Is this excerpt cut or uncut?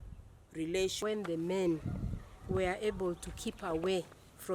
uncut